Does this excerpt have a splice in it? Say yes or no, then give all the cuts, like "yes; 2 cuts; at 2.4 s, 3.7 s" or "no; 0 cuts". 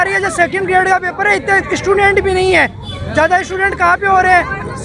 no; 0 cuts